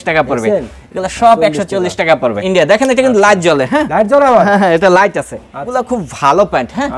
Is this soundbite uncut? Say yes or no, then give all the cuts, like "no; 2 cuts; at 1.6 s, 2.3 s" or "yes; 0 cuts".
no; 2 cuts; at 2.4 s, 5.7 s